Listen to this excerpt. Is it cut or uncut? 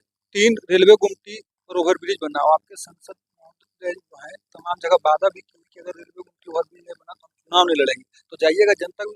uncut